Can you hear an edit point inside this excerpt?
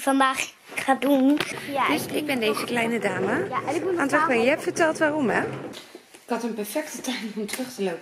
yes; 2 cuts; at 1.6 s, 5.7 s

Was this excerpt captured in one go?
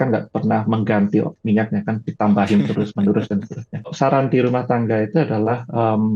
no; 1 cut; at 3.9 s

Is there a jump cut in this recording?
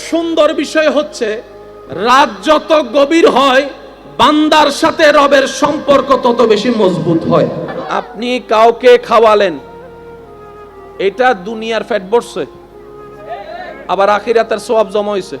yes; 1 cut; at 7.7 s

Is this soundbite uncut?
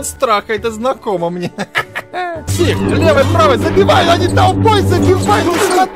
no; 1 cut; at 2.5 s

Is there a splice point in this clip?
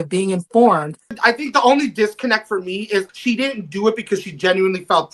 yes; 2 cuts; at 1.1 s, 3.1 s

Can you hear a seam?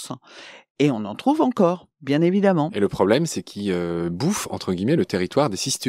no; 0 cuts

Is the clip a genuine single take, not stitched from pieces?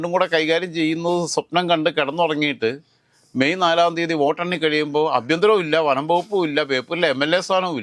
yes; 0 cuts

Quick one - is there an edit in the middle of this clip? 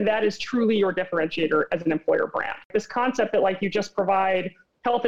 yes; 1 cut; at 2.7 s

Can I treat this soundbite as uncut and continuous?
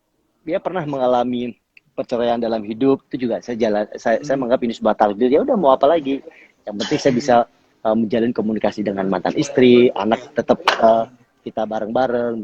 yes; 0 cuts

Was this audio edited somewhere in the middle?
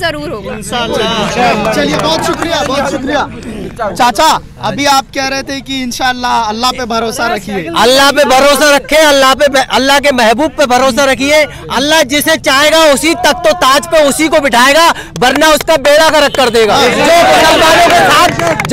no; 0 cuts

